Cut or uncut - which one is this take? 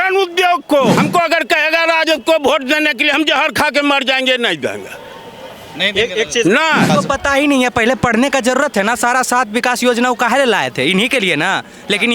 cut